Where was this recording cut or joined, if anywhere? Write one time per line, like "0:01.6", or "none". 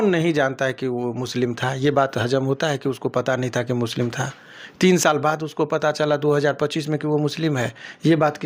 none